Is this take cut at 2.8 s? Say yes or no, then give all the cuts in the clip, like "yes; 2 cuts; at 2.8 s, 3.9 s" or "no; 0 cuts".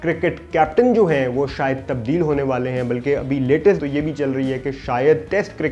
no; 0 cuts